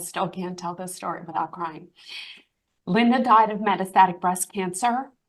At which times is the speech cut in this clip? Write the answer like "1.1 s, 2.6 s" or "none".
none